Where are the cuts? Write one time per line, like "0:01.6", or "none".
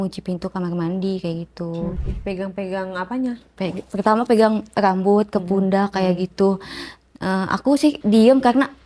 0:02.1
0:08.0